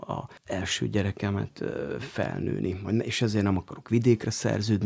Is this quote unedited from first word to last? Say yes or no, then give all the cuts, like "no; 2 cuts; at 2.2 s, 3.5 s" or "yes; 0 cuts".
yes; 0 cuts